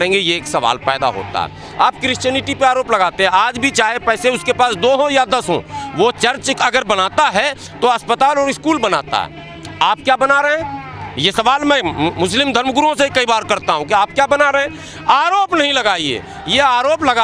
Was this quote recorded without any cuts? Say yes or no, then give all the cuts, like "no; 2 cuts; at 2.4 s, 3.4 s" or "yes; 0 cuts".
yes; 0 cuts